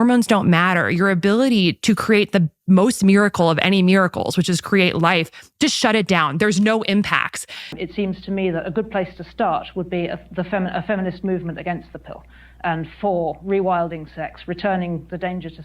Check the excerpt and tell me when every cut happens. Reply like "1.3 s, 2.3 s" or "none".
7.8 s